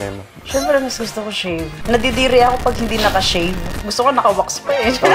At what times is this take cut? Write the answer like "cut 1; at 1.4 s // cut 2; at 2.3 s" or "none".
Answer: cut 1; at 1.8 s // cut 2; at 3.7 s